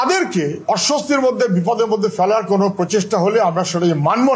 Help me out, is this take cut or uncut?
uncut